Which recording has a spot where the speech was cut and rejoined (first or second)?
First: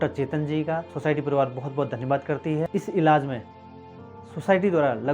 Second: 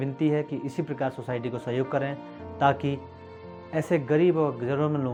first